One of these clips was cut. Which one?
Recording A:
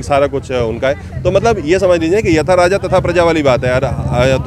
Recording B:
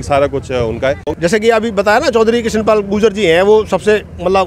B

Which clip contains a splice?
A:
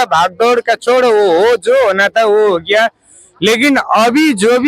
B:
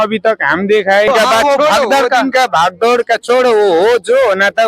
B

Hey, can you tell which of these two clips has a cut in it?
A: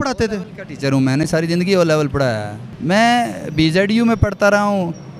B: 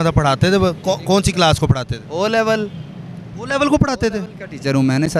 A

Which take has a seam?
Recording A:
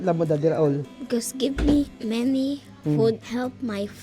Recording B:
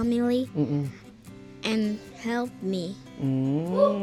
A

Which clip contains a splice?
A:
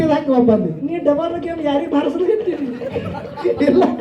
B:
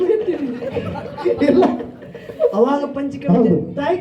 B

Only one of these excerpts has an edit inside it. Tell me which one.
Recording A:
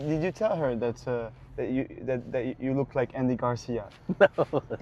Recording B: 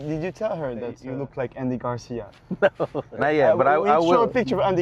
B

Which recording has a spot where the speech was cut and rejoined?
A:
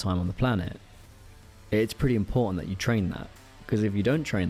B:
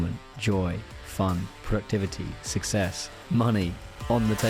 B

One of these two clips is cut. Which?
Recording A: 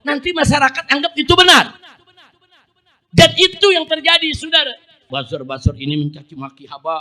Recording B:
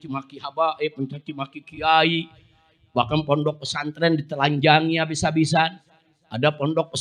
A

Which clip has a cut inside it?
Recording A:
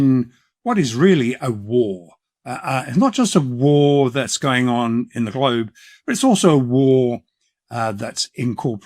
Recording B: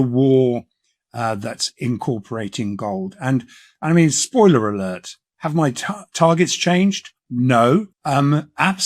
B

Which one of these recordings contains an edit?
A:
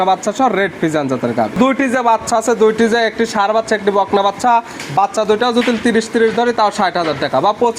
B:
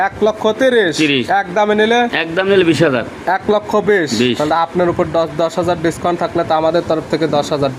A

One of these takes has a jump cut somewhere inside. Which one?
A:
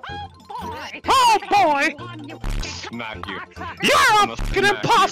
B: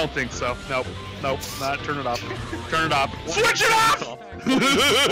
B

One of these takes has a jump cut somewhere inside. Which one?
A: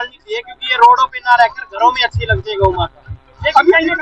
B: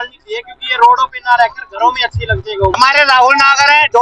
B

